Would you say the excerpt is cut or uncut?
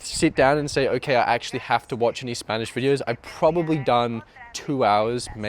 uncut